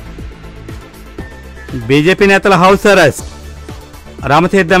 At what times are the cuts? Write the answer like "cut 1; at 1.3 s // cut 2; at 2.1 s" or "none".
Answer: cut 1; at 1.4 s